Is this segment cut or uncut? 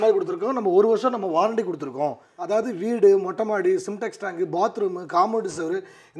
cut